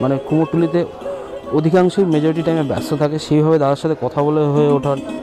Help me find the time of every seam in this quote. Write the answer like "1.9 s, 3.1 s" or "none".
none